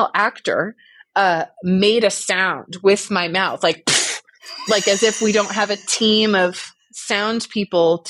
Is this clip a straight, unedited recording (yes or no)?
yes